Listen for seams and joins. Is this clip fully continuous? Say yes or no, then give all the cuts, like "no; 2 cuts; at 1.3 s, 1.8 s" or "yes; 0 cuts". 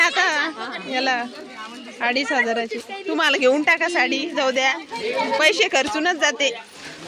yes; 0 cuts